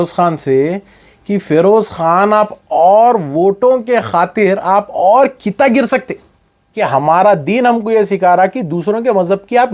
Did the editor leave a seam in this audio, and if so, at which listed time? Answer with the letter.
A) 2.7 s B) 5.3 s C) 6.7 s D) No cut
C